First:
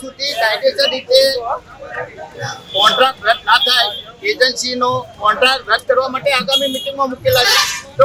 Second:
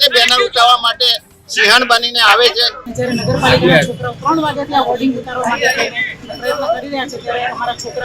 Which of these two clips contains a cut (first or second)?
second